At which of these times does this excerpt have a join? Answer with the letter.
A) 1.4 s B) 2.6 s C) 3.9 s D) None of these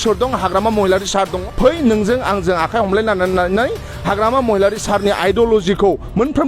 A